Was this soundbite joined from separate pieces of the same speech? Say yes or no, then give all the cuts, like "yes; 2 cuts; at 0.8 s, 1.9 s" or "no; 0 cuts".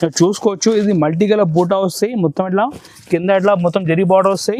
no; 0 cuts